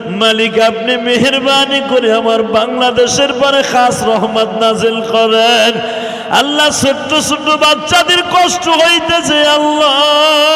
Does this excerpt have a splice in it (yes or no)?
no